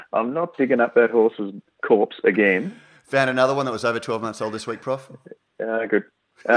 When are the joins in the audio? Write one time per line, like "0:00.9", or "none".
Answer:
none